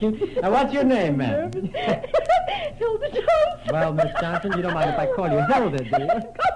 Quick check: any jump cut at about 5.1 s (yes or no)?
yes